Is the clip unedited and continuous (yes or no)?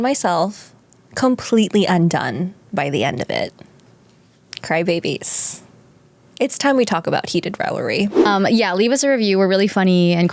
no